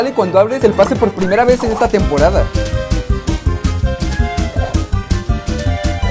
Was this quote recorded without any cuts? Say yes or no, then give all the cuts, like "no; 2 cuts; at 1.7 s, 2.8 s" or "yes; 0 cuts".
yes; 0 cuts